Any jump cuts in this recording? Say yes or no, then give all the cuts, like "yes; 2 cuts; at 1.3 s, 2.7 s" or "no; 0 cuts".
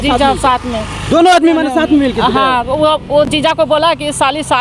no; 0 cuts